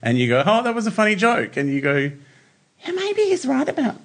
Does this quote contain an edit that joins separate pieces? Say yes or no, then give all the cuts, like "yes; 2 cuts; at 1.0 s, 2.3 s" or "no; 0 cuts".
no; 0 cuts